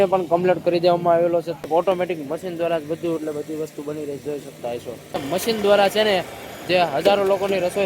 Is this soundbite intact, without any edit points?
no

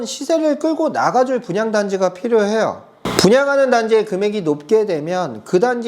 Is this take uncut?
yes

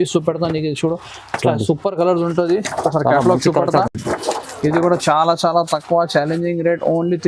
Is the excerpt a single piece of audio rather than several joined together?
yes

